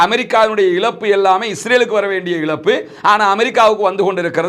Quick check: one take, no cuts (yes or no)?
yes